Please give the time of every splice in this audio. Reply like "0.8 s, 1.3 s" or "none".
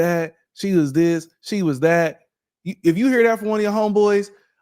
none